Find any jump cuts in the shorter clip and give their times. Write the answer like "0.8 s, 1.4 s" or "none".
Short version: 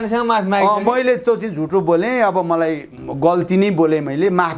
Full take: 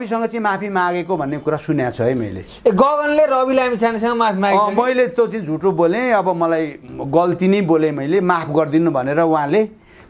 none